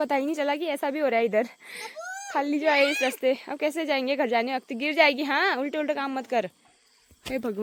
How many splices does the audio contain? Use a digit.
0